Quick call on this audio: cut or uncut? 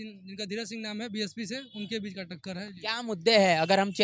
uncut